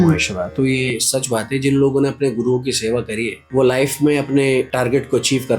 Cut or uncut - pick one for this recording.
cut